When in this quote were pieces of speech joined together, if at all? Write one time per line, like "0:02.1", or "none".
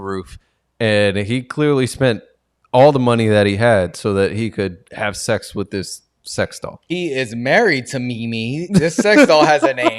0:06.8